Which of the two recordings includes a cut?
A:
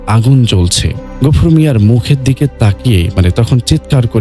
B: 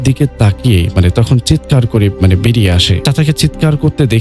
B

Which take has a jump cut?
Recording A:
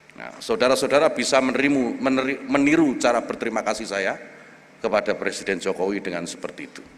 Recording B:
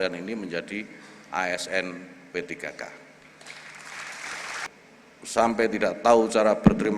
B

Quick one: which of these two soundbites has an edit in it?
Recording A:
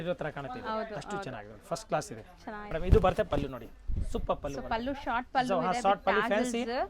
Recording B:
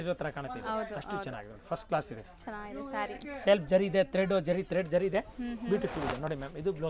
A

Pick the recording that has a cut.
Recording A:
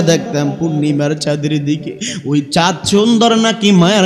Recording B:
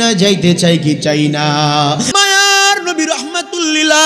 B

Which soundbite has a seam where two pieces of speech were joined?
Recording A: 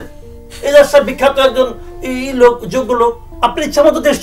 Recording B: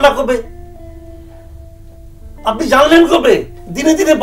A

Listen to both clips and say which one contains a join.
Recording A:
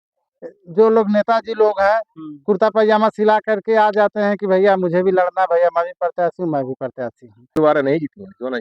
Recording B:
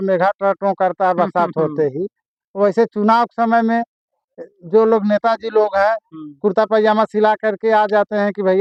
A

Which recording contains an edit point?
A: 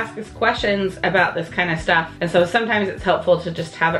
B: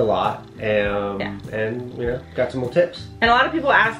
A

